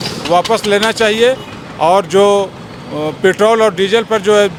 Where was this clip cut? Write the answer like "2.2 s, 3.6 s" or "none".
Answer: none